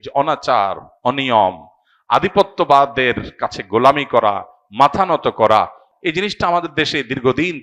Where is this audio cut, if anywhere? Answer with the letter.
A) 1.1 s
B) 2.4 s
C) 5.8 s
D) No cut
C